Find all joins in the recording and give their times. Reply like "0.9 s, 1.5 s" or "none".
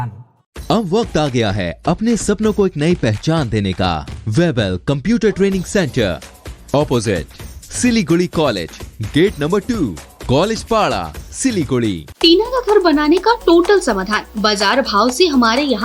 4.1 s, 12.1 s